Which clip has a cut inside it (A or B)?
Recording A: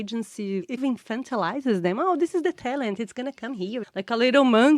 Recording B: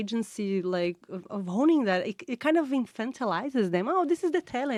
A